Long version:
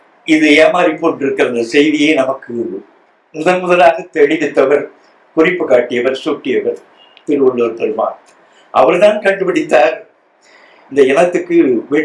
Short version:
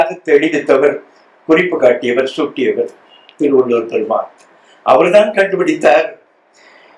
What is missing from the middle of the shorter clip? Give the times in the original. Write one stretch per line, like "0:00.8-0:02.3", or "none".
none